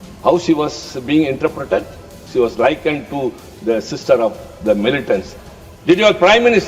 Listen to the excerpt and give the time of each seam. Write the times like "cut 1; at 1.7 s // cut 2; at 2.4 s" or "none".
cut 1; at 5.3 s